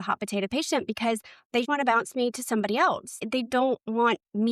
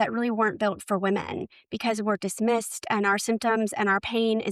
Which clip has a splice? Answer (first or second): first